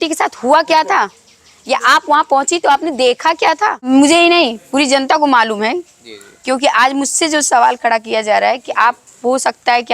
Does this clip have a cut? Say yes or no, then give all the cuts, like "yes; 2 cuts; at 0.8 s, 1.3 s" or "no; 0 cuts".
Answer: yes; 1 cut; at 3.9 s